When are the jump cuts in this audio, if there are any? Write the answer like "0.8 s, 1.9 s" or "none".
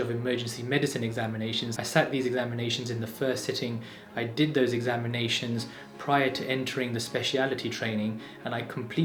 none